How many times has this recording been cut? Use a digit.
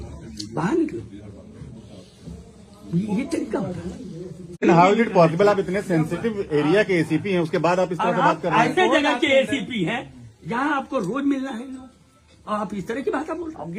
1